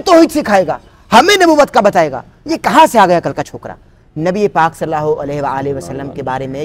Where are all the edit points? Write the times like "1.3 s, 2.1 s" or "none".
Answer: none